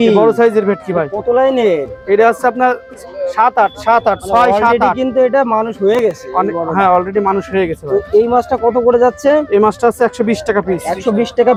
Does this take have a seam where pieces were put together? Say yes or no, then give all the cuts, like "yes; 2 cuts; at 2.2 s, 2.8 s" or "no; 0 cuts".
no; 0 cuts